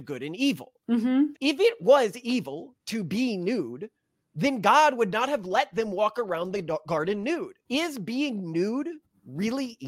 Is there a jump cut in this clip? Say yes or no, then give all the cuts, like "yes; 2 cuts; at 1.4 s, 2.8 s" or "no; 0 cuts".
yes; 2 cuts; at 1.3 s, 7.6 s